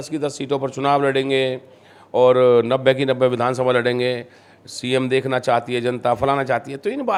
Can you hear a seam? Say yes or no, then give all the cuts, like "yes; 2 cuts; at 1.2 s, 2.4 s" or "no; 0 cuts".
no; 0 cuts